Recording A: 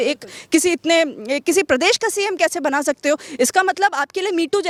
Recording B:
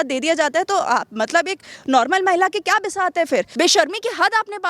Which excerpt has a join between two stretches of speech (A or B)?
B